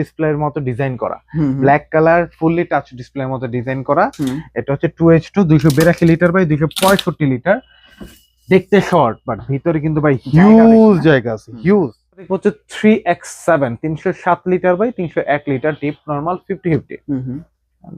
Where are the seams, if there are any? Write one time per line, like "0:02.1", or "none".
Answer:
0:12.3